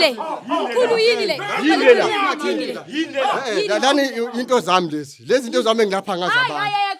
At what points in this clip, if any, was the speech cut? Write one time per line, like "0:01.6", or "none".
none